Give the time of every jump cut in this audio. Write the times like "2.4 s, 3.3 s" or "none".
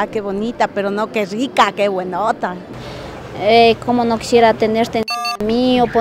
none